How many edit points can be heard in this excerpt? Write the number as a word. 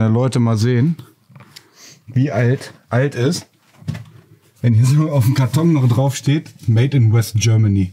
zero